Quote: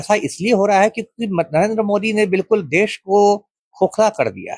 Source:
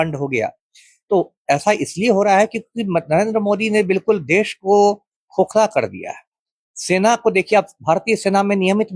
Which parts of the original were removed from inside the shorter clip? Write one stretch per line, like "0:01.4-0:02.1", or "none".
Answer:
none